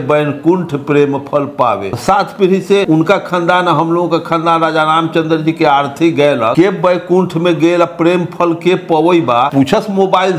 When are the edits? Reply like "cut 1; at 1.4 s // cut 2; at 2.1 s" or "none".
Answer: cut 1; at 1.9 s // cut 2; at 2.8 s // cut 3; at 6.5 s // cut 4; at 9.5 s